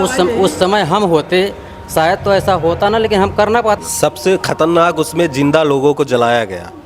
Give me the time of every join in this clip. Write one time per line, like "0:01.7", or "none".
0:03.8